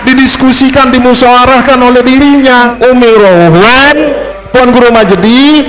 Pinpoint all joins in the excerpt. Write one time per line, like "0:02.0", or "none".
0:02.7
0:04.3